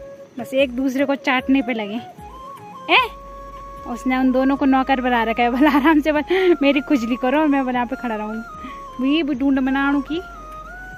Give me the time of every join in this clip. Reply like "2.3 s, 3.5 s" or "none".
none